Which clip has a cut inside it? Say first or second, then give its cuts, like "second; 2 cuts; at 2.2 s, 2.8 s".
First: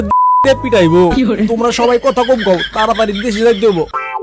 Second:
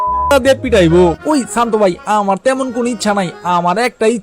second; 1 cut; at 1.2 s